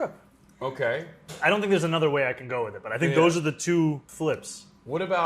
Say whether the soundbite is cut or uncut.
cut